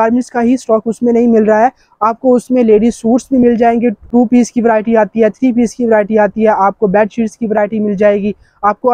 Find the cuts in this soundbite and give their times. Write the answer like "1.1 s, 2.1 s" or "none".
4.1 s

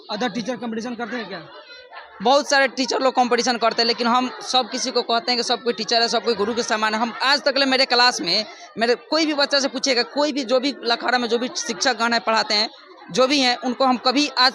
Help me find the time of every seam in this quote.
none

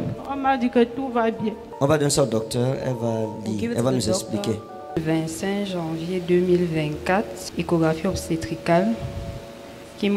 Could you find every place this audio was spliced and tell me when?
1.7 s, 4.9 s, 7.4 s

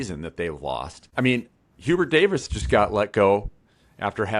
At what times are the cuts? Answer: 1.0 s

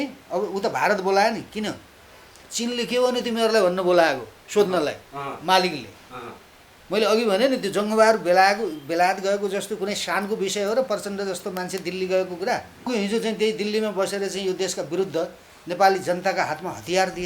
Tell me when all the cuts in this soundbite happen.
12.9 s

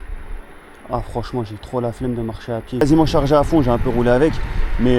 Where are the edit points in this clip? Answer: 2.8 s

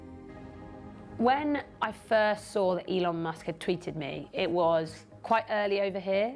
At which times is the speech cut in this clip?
1.1 s

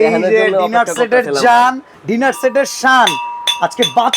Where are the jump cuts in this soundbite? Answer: 1.9 s

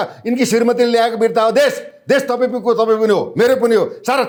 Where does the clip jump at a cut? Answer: none

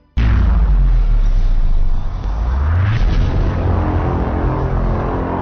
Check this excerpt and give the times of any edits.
none

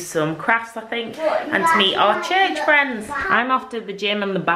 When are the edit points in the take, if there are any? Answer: 3.1 s

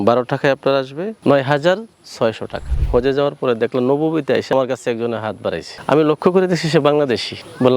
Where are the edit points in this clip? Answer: 2.5 s, 4.5 s

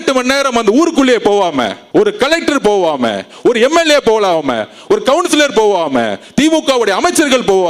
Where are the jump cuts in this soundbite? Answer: none

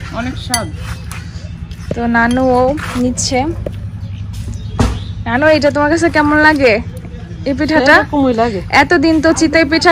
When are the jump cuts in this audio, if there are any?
none

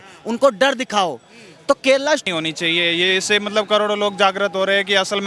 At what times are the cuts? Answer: 2.2 s

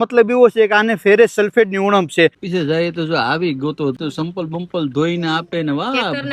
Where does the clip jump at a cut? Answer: 2.4 s, 4.0 s

